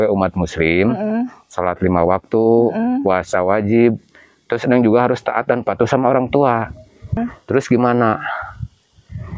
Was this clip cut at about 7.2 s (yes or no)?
yes